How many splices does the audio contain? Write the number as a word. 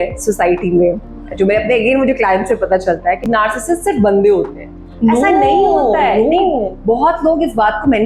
zero